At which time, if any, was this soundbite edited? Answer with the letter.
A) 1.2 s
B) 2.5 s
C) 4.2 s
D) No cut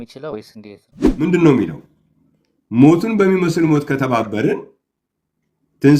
A